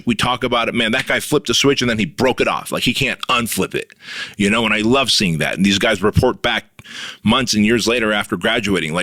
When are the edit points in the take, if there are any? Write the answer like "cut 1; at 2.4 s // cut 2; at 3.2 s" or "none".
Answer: none